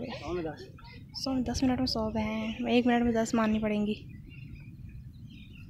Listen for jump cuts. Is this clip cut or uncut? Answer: uncut